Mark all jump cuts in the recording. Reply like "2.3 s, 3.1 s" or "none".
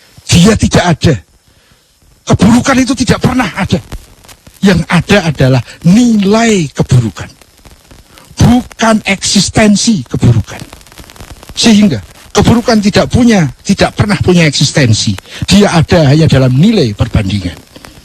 12.1 s